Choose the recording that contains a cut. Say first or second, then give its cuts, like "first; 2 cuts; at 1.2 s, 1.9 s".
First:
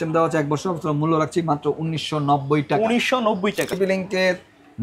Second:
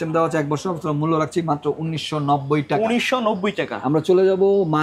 first; 1 cut; at 3.7 s